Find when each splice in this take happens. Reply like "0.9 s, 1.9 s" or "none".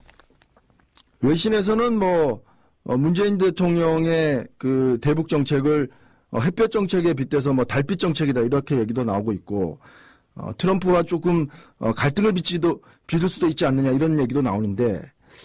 none